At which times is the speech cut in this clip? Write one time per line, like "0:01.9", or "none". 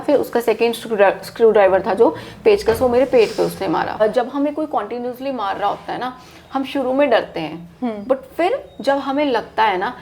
0:04.0